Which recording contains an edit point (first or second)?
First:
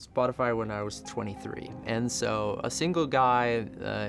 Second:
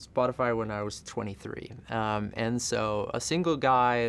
first